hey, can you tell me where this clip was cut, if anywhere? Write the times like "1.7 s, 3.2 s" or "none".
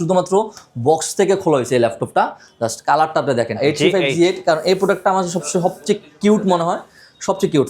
3.6 s

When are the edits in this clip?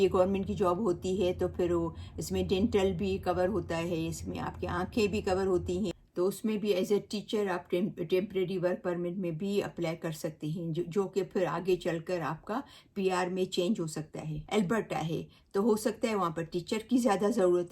6.0 s, 14.4 s

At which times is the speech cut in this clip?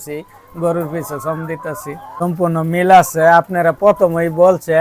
2.0 s

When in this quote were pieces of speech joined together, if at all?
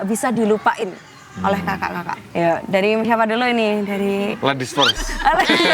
2.2 s

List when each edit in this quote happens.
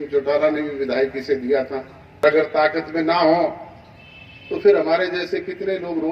2.2 s

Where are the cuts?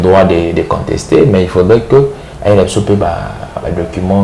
none

